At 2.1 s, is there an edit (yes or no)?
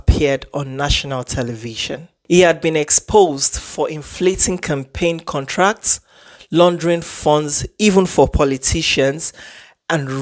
yes